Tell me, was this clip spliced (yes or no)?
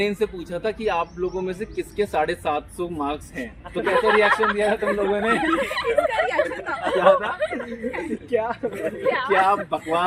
no